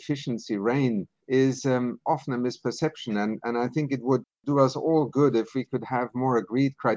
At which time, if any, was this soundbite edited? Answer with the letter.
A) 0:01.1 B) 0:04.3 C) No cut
A